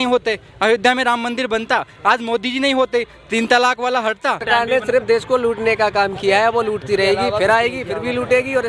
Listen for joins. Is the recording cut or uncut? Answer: cut